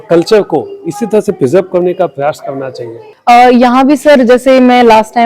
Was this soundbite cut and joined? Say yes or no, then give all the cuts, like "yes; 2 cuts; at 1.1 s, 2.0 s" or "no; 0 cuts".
no; 0 cuts